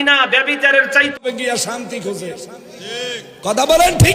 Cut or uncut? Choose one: cut